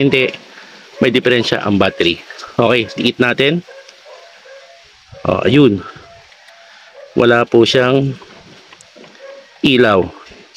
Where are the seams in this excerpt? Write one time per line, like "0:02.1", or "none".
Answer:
none